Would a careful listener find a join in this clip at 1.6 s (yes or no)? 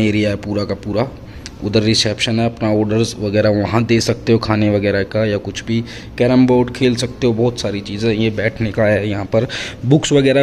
no